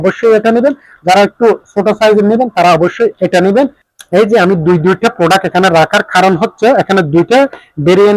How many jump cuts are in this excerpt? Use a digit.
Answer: 1